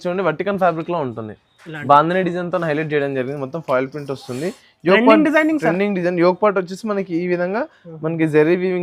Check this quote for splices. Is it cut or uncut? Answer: uncut